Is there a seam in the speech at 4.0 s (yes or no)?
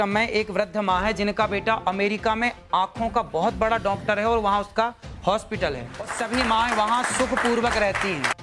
no